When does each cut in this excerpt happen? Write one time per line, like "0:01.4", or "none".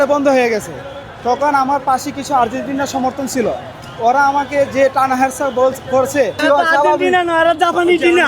0:06.3